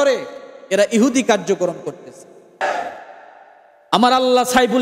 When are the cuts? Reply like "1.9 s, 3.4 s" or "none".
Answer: 2.6 s